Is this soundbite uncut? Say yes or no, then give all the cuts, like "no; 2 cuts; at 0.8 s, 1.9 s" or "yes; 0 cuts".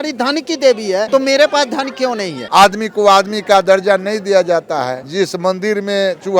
no; 3 cuts; at 1.1 s, 2.3 s, 5.0 s